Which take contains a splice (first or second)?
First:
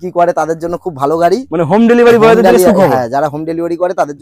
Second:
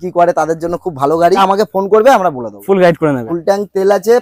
second